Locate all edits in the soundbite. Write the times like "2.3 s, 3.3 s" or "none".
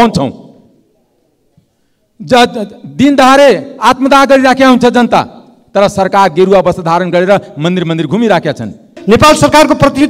8.9 s